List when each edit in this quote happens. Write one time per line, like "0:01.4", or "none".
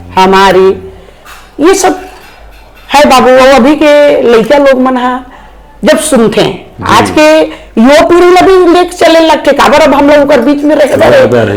none